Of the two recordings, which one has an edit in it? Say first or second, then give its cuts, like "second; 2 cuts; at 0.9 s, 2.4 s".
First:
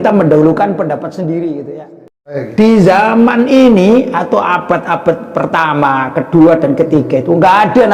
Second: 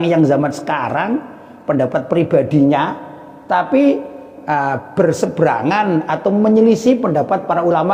first; 1 cut; at 2.4 s